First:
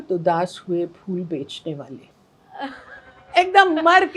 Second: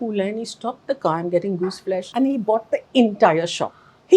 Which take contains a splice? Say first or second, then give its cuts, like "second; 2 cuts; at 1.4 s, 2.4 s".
second; 1 cut; at 2.1 s